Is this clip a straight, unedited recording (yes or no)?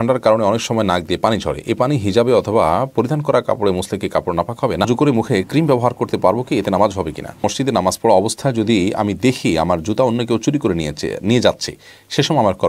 no